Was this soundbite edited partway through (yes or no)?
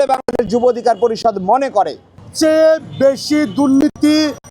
yes